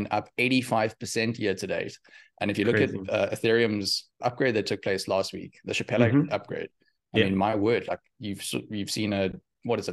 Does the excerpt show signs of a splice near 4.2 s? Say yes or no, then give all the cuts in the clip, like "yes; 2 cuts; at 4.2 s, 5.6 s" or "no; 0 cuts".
yes; 1 cut; at 4.2 s